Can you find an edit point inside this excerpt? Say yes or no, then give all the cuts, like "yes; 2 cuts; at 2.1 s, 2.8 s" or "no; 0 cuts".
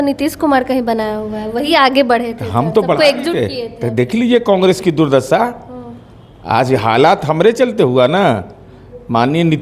no; 0 cuts